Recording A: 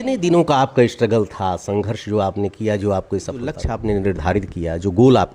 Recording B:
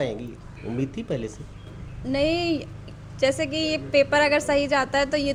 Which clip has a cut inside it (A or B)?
A